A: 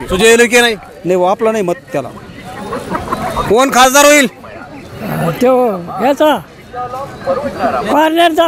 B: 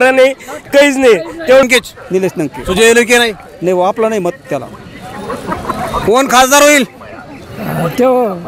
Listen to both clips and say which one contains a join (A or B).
B